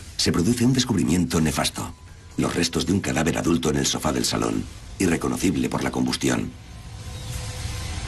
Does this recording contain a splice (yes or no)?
yes